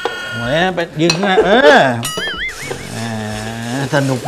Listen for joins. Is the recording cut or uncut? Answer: cut